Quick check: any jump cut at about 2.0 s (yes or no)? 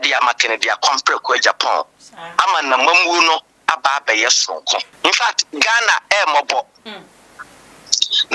no